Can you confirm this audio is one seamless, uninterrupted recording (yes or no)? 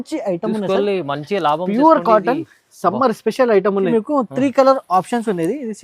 no